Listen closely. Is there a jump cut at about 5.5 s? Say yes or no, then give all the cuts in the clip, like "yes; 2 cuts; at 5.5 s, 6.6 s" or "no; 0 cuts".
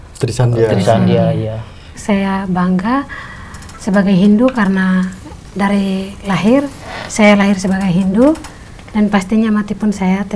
no; 1 cut; at 1.9 s